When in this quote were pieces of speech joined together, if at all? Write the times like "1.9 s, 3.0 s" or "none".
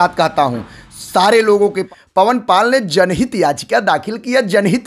1.8 s